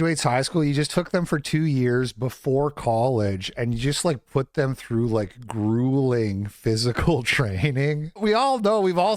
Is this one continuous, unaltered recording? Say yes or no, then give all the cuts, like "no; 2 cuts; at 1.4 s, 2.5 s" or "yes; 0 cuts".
yes; 0 cuts